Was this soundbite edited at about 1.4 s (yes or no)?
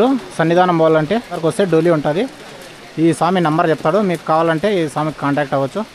yes